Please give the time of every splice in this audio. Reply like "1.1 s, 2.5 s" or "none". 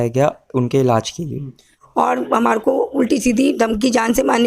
1.7 s